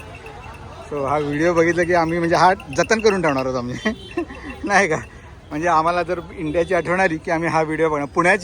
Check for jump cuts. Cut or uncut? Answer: uncut